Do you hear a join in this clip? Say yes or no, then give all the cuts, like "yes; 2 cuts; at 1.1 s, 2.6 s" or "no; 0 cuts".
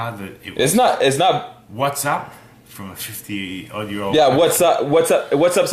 no; 0 cuts